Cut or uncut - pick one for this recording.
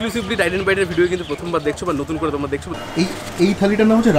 cut